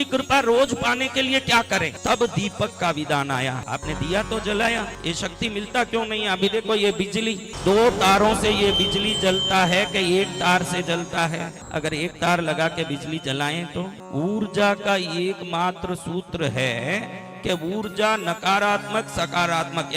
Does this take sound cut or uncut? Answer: cut